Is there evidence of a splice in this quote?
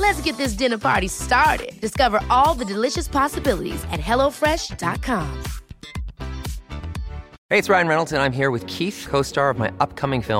yes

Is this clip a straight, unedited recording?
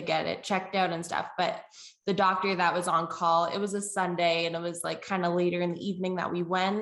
yes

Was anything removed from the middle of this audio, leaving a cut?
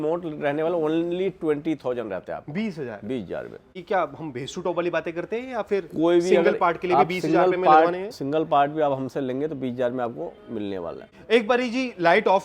no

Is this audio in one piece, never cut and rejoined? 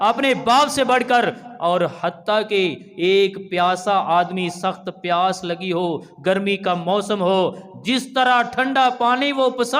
yes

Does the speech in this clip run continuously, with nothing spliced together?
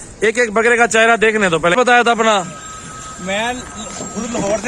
no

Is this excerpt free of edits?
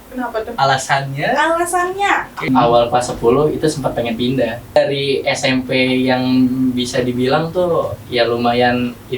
no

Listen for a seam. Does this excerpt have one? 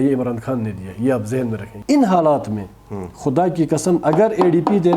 yes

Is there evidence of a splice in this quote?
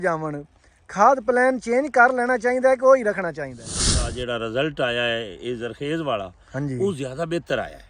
yes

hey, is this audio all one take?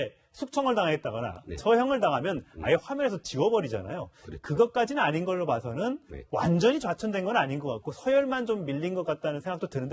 no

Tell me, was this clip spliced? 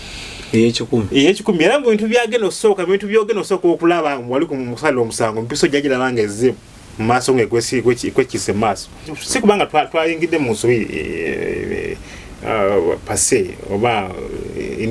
yes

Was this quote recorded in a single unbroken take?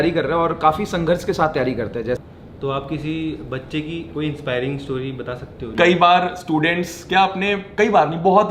no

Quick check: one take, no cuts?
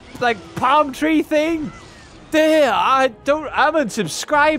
yes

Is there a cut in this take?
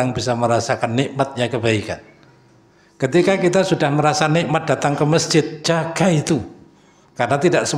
no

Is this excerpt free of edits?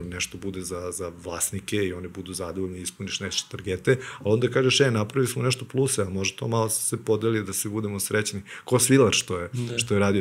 yes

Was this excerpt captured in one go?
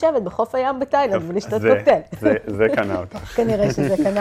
yes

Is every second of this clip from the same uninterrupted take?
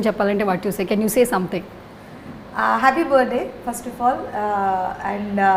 yes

